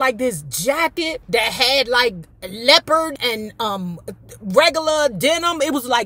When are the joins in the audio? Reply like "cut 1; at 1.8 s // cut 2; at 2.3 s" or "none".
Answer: cut 1; at 1.2 s // cut 2; at 3.1 s